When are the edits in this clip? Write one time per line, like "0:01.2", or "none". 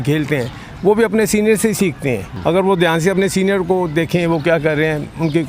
0:02.3